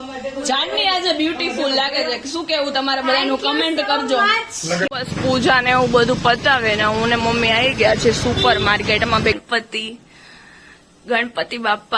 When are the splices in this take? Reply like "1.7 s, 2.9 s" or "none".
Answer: 4.9 s, 9.4 s